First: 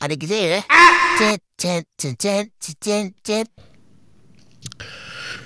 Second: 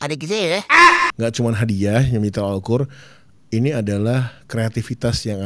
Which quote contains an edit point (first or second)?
second